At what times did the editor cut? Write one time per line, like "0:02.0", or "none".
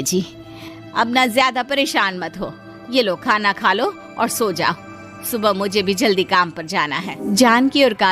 0:07.1